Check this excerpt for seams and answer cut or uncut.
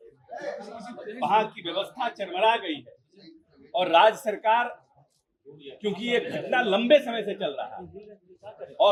uncut